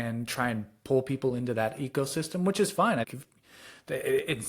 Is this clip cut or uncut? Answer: cut